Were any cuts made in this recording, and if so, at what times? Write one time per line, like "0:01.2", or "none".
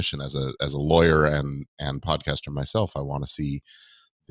none